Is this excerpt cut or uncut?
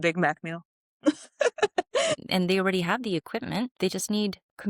cut